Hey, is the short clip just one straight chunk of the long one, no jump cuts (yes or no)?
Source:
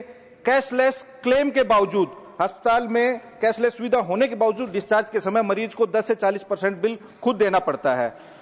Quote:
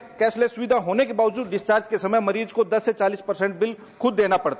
yes